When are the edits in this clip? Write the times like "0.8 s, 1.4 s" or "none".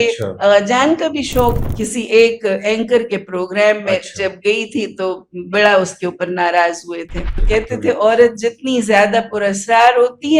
1.6 s, 7.3 s